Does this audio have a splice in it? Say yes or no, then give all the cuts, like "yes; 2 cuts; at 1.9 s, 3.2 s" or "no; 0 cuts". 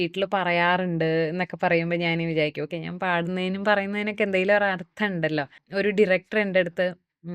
yes; 1 cut; at 5.6 s